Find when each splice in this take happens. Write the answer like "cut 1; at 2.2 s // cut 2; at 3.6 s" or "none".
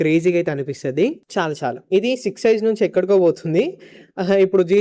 none